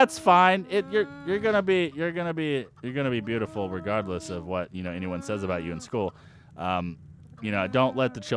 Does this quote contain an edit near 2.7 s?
yes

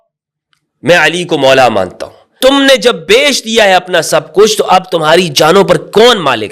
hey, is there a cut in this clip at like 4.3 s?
no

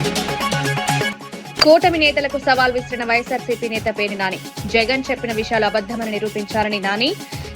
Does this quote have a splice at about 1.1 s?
yes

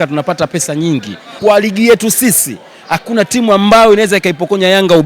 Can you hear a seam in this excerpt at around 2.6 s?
no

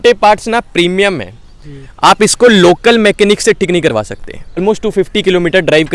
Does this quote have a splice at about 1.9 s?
no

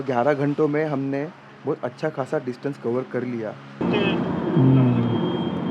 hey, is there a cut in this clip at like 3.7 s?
yes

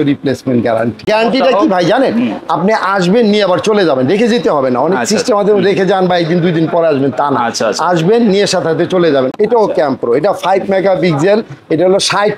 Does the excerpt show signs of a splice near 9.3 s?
yes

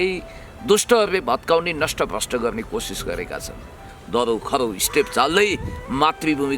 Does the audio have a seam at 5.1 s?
no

